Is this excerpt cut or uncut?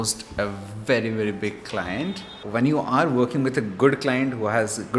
cut